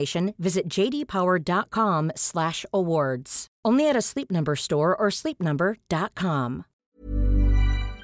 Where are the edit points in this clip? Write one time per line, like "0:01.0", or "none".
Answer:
0:06.9

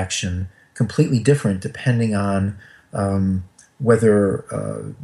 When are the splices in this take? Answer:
none

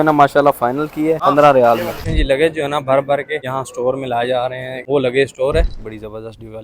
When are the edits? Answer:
0:01.2
0:02.1
0:03.4
0:04.7
0:05.7

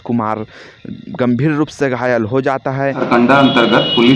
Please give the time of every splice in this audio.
0:03.0

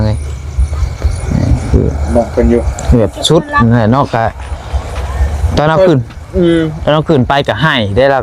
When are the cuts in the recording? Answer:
none

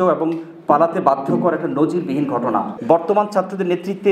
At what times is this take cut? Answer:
0:02.7

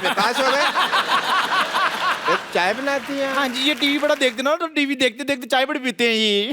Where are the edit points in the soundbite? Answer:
0:02.4

